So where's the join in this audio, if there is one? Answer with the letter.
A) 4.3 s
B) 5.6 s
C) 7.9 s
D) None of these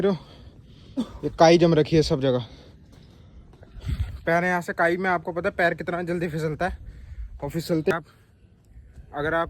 C